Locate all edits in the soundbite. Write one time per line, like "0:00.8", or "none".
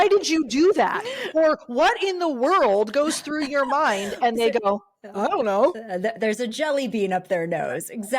none

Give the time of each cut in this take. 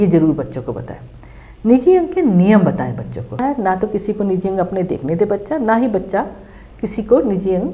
0:03.4

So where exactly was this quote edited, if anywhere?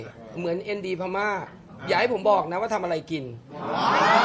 none

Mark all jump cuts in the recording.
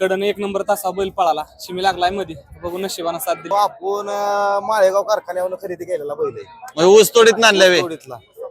0:03.4

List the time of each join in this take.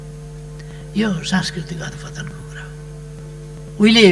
0:03.2

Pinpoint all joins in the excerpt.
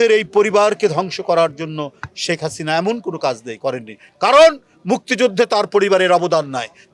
none

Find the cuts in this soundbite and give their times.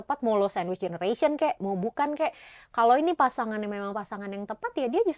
none

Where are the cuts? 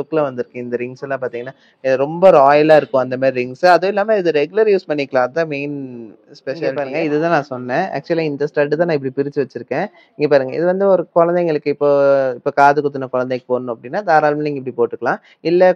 0:06.8

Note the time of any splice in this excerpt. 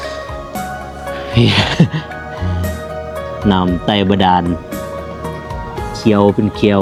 none

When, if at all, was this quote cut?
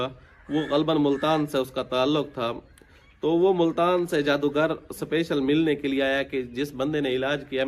none

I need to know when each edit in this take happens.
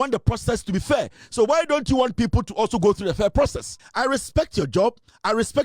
0:03.8

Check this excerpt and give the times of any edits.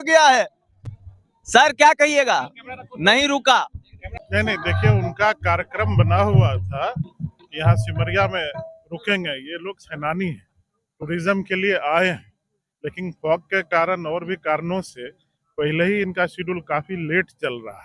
none

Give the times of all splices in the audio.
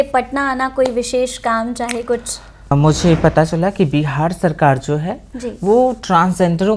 0:02.7

